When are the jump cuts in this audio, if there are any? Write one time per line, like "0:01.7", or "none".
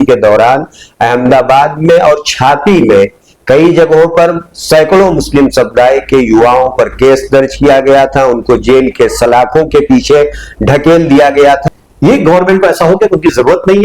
0:11.6